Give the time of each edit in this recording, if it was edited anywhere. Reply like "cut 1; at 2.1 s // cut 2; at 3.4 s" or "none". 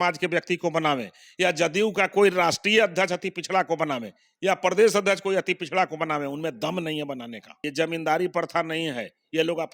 cut 1; at 7.7 s